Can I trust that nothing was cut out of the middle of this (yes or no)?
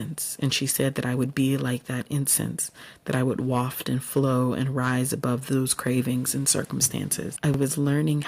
no